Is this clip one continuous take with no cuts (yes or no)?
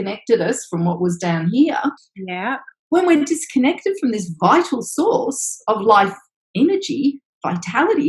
no